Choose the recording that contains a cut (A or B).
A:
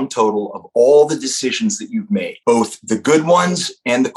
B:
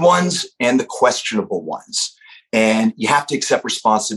A